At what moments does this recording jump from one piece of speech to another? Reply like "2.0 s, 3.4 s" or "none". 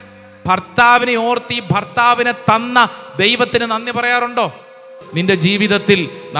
5.0 s